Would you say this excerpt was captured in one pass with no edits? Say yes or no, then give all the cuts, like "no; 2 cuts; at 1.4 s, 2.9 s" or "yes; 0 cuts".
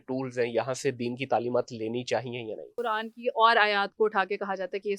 no; 1 cut; at 2.8 s